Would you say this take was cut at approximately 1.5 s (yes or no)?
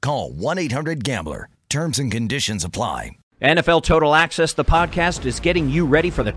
no